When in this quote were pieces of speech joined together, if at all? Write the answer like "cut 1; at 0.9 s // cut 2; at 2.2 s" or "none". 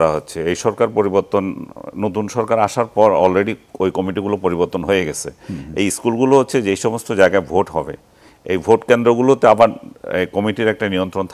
none